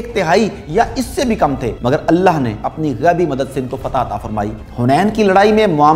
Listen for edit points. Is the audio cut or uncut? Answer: cut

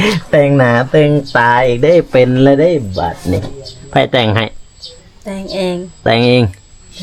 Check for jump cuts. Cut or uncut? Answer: uncut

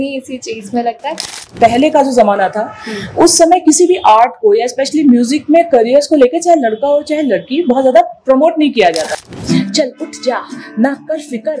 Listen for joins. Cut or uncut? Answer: cut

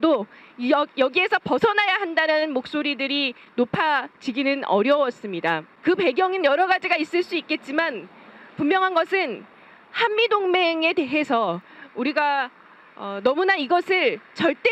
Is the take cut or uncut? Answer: uncut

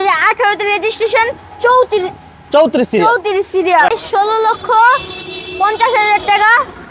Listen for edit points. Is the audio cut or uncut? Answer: cut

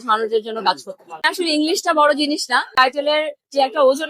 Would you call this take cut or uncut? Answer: cut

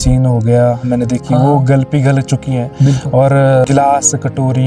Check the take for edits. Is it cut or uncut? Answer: uncut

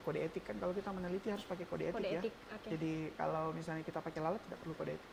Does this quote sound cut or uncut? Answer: uncut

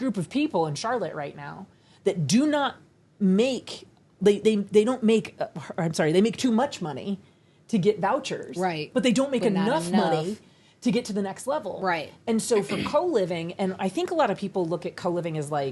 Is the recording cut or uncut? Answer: uncut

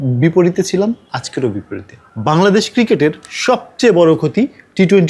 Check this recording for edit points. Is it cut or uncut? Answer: uncut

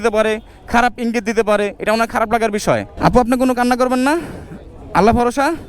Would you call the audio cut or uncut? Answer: cut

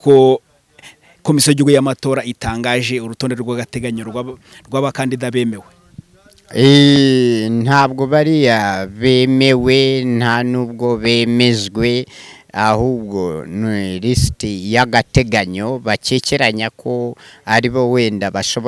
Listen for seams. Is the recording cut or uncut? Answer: uncut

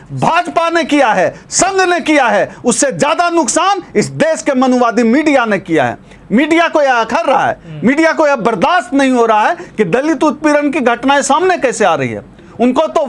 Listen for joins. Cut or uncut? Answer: uncut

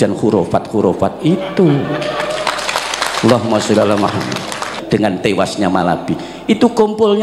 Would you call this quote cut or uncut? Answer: cut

